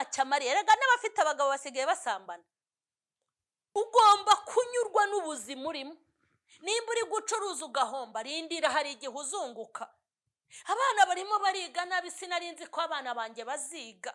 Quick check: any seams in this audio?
yes; 1 cut; at 3.8 s

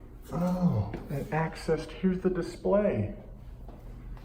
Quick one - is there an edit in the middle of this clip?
no; 0 cuts

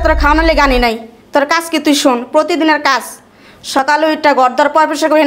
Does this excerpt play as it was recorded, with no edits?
yes; 0 cuts

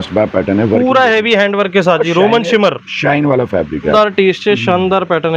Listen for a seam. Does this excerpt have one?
yes; 1 cut; at 3.9 s

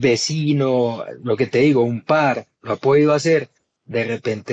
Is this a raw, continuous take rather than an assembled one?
yes; 0 cuts

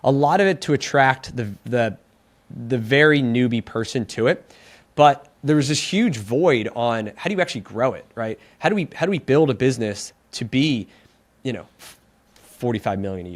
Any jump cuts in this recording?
no; 0 cuts

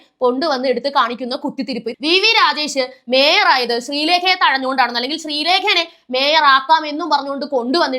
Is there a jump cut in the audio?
yes; 1 cut; at 1.9 s

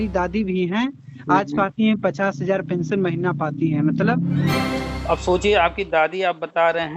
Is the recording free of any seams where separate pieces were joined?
no; 1 cut; at 4.6 s

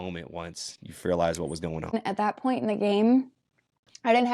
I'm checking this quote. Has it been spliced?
yes; 1 cut; at 1.9 s

